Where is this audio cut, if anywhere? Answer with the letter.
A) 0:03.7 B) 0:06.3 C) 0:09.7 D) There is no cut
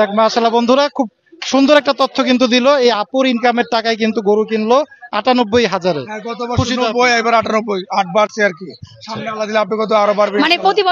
D